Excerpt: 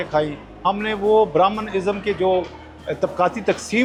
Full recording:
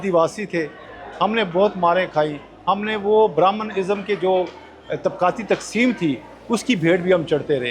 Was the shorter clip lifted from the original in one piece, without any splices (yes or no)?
yes